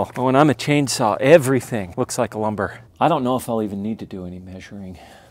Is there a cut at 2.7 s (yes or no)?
yes